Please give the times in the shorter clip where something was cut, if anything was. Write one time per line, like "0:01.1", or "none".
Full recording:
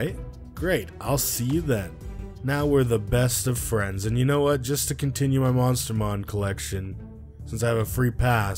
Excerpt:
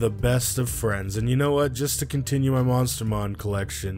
none